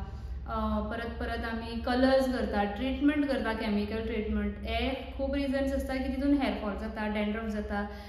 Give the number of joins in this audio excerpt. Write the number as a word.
zero